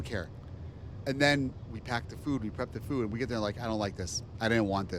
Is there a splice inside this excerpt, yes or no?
no